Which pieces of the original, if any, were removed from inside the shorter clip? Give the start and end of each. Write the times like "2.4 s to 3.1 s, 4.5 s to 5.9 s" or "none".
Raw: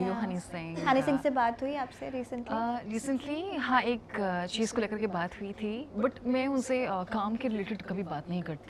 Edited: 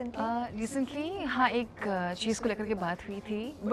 none